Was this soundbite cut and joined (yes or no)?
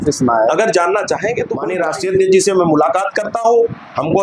yes